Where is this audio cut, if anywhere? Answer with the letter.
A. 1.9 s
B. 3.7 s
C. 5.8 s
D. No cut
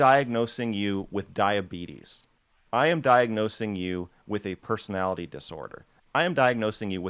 D